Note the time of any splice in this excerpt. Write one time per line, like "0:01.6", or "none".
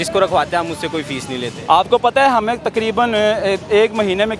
none